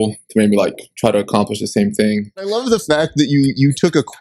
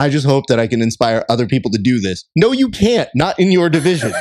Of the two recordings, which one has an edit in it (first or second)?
first